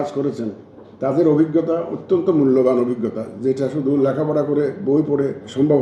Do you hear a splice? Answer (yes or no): no